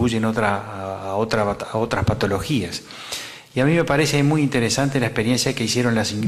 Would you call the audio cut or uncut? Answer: cut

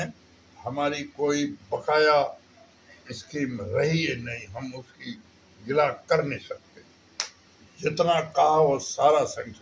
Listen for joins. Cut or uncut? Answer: uncut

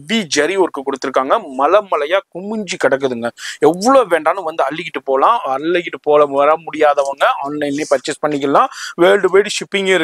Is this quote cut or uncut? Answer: uncut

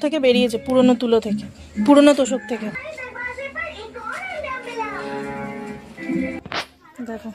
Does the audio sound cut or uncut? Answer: uncut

